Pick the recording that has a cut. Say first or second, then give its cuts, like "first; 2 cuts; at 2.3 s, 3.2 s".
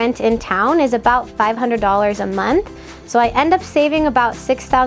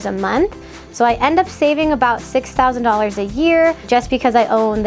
second; 1 cut; at 3.8 s